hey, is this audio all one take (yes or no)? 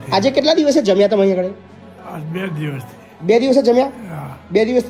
yes